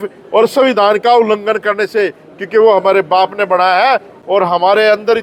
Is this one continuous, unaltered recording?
yes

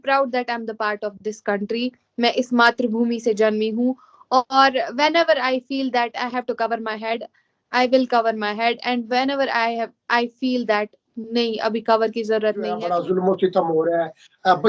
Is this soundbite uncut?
no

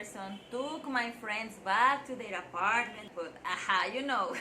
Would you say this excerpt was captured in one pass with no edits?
no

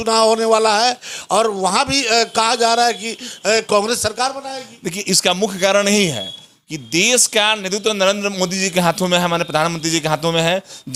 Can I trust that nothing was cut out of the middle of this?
yes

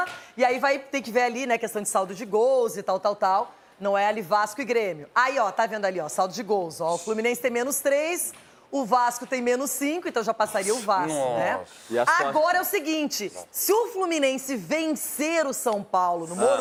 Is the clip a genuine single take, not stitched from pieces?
yes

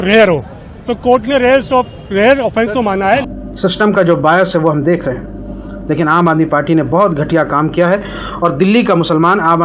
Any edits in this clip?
yes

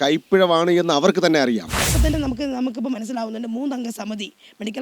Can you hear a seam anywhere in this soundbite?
yes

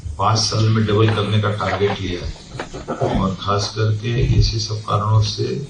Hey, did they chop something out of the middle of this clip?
no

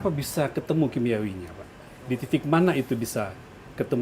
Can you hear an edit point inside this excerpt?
no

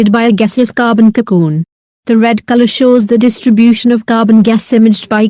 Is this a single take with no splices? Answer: no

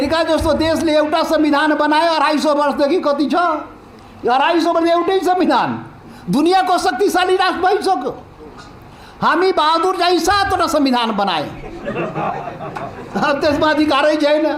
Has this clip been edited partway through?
no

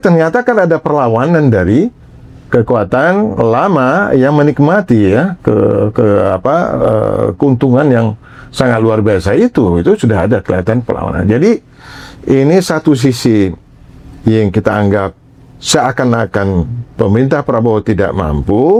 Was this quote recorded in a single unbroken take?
yes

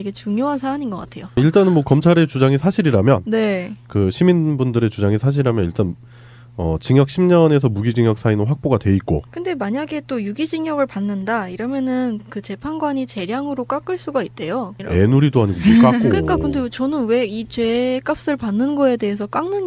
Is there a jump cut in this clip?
yes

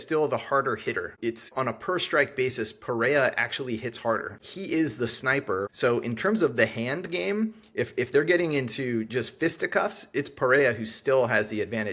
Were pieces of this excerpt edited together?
yes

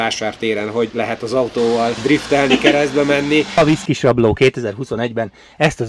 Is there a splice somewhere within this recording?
yes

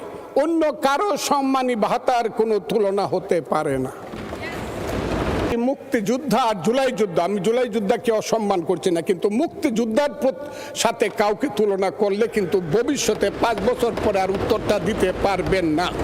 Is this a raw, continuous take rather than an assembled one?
no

